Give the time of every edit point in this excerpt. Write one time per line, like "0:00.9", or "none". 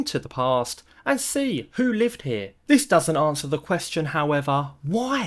0:02.5

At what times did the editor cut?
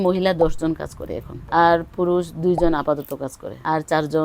none

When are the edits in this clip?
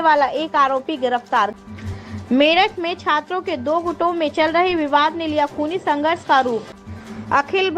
0:01.5
0:06.8

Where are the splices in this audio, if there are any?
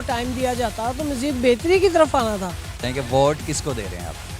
0:02.8

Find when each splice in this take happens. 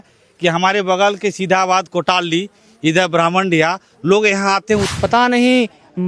0:04.9

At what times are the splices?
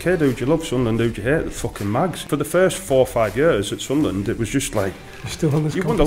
0:02.2

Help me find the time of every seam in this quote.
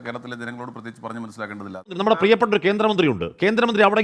0:02.0

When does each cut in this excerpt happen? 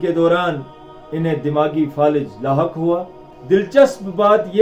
0:03.7

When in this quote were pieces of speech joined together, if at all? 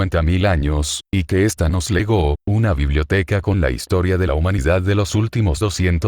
0:00.9

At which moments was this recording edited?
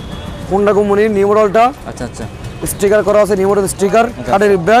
none

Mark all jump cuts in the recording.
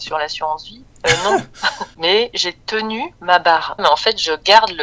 0:01.9
0:03.8

